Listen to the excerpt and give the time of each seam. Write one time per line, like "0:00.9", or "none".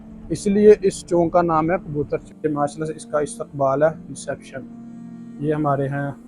0:02.3